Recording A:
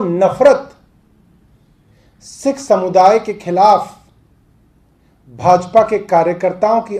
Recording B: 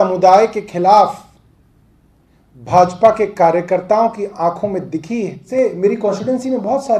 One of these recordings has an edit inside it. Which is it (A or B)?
B